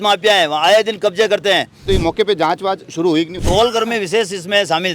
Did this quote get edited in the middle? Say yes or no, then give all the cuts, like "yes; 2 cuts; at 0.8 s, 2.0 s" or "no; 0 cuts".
yes; 2 cuts; at 1.8 s, 3.4 s